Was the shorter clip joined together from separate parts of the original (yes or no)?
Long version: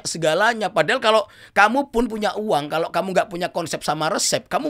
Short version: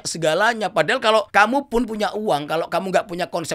yes